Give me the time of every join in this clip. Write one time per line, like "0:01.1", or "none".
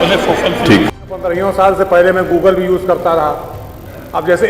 0:00.9